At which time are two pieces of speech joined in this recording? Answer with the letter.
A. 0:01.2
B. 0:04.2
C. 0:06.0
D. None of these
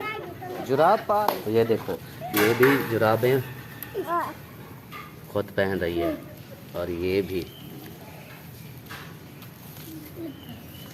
A